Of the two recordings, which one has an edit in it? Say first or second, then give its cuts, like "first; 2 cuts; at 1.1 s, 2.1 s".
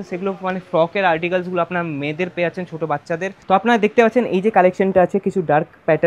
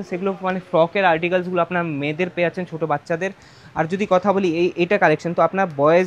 first; 1 cut; at 3.4 s